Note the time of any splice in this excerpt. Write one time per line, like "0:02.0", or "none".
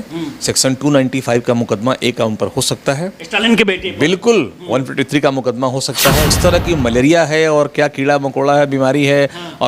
0:06.4